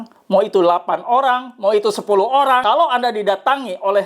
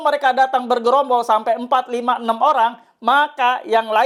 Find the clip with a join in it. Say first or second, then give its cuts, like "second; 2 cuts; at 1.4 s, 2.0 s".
first; 1 cut; at 2.6 s